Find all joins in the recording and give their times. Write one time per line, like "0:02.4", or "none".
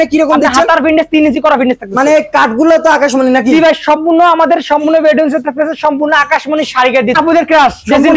0:07.1